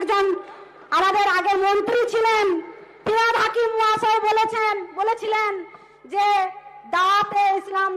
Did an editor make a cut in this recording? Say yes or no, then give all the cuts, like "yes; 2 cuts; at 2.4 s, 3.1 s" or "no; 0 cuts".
no; 0 cuts